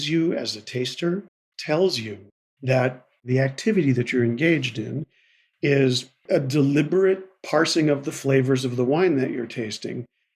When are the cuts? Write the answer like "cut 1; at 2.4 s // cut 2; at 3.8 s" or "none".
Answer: cut 1; at 1.5 s // cut 2; at 3.3 s